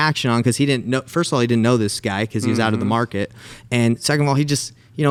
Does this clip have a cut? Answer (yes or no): no